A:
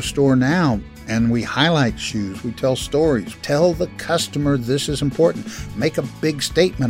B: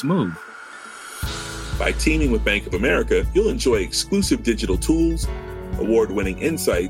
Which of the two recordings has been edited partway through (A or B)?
A